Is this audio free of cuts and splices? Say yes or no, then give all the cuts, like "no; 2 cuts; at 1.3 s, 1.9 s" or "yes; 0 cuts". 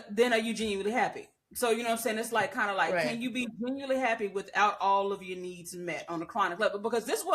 yes; 0 cuts